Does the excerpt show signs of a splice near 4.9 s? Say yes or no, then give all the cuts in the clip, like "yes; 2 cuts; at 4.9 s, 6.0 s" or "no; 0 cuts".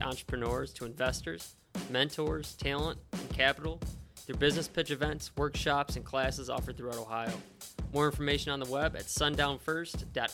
no; 0 cuts